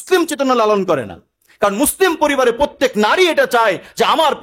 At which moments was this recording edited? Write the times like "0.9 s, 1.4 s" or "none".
none